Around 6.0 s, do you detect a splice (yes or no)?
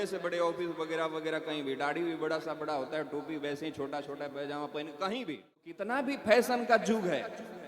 yes